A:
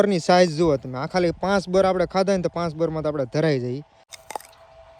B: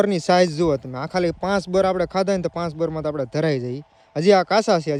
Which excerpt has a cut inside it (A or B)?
A